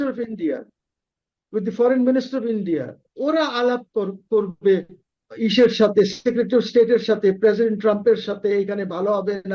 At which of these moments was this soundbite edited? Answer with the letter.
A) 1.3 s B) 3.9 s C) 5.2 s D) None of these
C